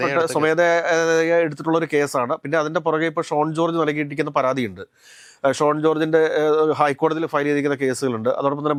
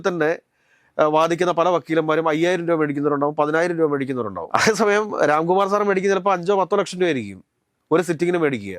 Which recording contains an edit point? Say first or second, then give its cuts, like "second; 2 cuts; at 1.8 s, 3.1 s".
second; 1 cut; at 4.4 s